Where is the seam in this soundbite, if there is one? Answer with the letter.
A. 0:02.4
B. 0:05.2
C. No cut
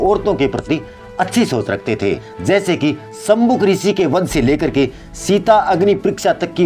A